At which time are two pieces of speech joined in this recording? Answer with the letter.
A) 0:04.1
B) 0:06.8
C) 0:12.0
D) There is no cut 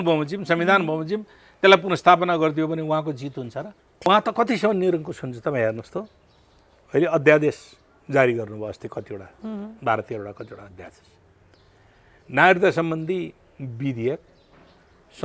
A